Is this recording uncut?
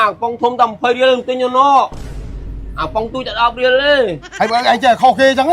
no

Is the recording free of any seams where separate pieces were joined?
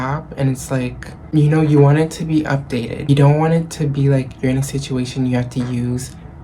no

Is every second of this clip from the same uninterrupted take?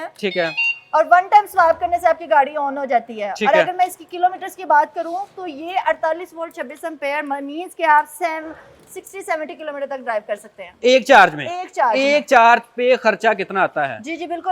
yes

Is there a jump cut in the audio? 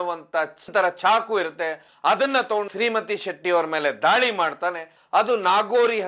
yes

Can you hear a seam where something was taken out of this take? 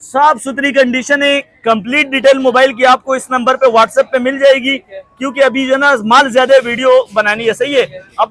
no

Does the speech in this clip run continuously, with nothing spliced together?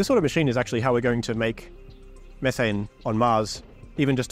yes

